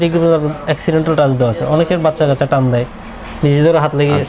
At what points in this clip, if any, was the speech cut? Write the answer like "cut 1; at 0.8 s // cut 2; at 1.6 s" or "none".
none